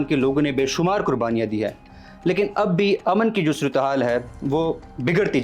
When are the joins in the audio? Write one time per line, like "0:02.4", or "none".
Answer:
none